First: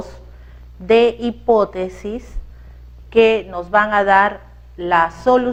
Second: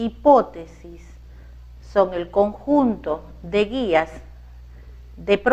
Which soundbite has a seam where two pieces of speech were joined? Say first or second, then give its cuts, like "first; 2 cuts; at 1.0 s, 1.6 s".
second; 1 cut; at 0.9 s